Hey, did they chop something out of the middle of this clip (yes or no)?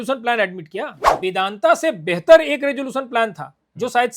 yes